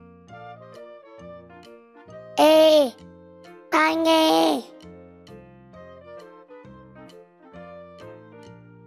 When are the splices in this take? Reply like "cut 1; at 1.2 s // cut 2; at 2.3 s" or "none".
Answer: none